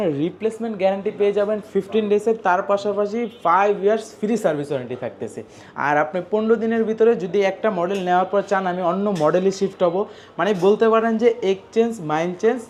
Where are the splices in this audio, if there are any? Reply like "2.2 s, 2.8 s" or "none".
none